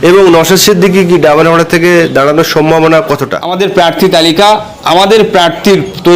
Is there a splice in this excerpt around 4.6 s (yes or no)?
no